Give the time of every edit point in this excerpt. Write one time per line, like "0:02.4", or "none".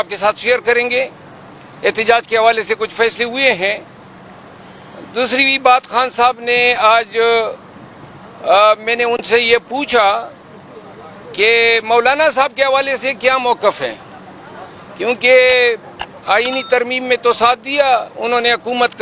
none